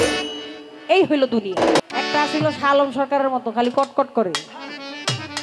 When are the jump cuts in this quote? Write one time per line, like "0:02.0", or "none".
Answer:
0:01.8